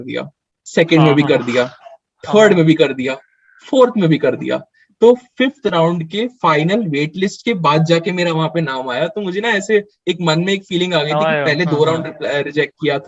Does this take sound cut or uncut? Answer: uncut